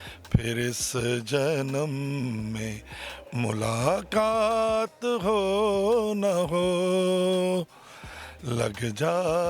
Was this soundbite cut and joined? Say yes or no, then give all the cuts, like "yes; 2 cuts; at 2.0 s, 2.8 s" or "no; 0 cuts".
no; 0 cuts